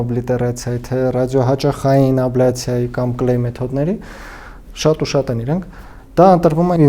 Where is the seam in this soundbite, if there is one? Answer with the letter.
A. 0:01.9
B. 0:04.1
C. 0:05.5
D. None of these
D